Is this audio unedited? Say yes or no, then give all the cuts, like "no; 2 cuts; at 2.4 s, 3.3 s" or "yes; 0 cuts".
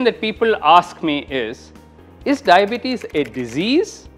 yes; 0 cuts